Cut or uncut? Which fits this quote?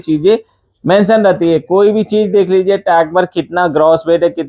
uncut